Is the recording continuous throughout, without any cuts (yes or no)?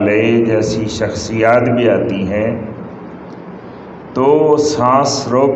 yes